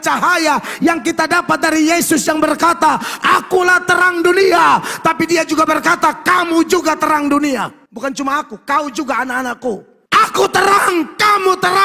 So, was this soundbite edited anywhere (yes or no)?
yes